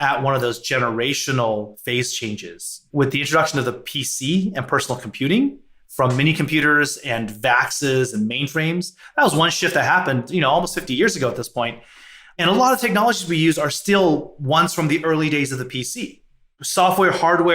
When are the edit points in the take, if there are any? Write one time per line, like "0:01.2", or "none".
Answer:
0:02.9